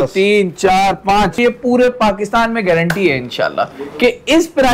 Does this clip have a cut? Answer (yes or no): yes